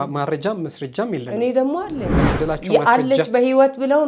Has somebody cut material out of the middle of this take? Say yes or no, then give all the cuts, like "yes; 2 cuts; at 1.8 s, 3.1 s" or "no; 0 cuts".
yes; 1 cut; at 2.1 s